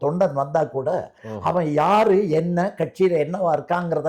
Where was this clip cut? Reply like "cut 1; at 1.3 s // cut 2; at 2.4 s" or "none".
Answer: cut 1; at 1.3 s

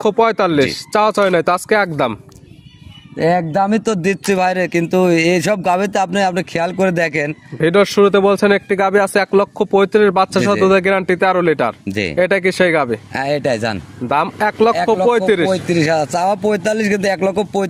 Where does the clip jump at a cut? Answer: none

